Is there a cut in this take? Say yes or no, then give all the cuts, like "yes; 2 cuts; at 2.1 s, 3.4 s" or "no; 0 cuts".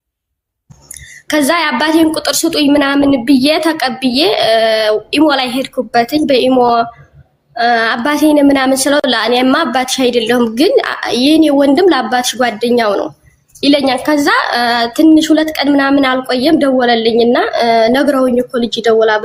no; 0 cuts